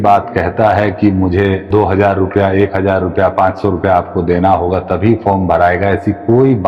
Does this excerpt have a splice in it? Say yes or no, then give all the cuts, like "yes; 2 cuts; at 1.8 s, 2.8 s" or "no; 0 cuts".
yes; 1 cut; at 1.7 s